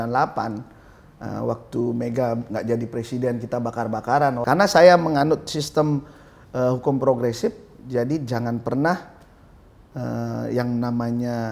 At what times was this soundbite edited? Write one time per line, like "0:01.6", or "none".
0:04.4